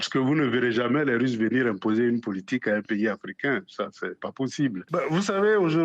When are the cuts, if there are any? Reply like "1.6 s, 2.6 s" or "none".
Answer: 4.8 s

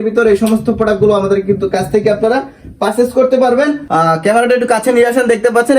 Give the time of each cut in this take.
3.8 s

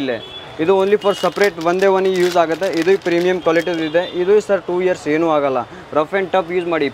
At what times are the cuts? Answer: none

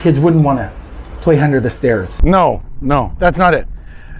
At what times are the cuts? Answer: 2.1 s

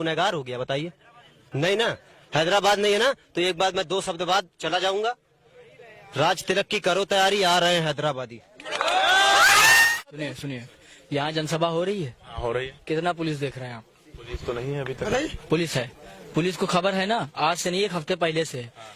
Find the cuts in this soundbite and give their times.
10.0 s

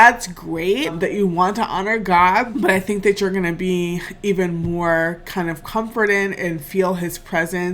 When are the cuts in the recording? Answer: 0.9 s, 2.5 s

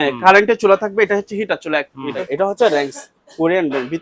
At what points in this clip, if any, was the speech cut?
2.2 s

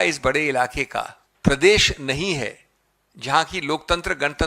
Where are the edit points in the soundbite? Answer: 1.2 s

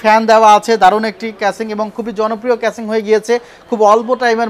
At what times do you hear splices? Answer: none

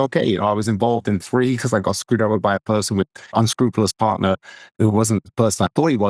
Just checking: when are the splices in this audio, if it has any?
3.3 s, 4.7 s

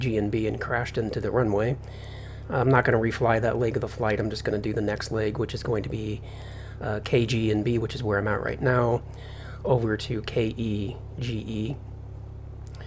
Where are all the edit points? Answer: none

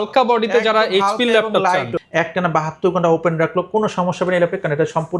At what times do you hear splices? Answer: 1.9 s

